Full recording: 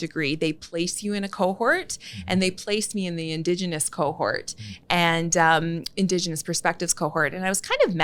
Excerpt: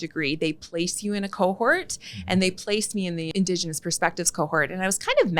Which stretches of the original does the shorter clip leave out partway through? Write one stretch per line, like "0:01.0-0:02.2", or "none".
0:03.3-0:05.9